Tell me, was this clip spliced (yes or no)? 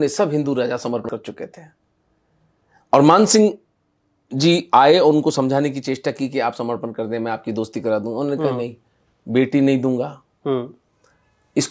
yes